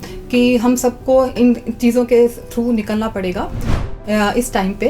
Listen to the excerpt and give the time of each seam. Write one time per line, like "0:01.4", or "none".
0:04.0